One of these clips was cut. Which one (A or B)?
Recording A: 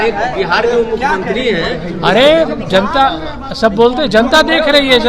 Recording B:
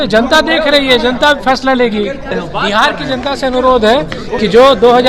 B